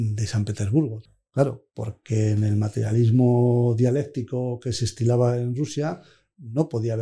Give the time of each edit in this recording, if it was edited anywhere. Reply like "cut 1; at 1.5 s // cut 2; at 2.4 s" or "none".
cut 1; at 1.0 s